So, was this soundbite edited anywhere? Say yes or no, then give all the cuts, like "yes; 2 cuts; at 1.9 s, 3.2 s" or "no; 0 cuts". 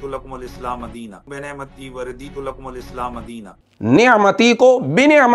yes; 2 cuts; at 0.7 s, 3.4 s